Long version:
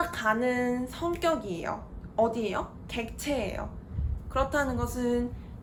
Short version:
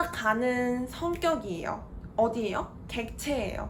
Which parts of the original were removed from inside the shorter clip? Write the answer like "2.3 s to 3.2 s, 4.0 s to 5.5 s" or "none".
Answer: none